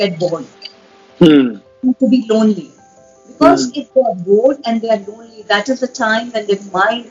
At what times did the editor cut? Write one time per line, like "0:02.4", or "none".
none